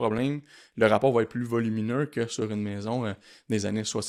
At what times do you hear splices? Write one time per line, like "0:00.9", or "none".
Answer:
none